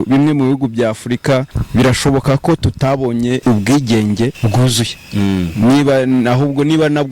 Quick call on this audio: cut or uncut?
cut